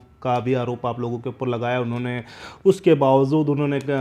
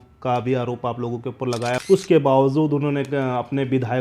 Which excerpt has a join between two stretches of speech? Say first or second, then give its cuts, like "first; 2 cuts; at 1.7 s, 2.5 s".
second; 1 cut; at 1.8 s